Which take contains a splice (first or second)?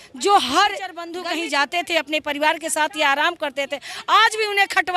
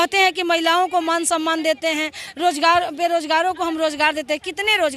first